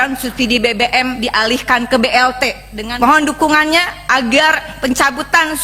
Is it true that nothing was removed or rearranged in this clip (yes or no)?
no